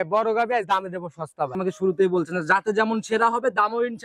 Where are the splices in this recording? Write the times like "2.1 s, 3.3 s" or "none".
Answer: 1.6 s